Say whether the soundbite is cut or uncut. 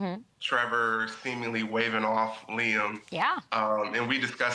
uncut